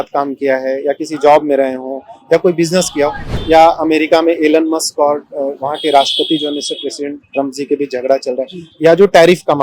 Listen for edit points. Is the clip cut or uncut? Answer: cut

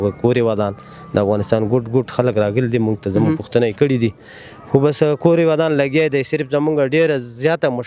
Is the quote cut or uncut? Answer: uncut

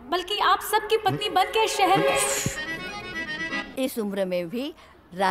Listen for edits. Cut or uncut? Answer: cut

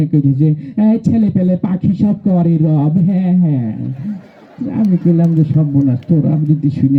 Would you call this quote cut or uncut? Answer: uncut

